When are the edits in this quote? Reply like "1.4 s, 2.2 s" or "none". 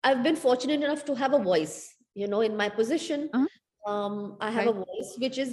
none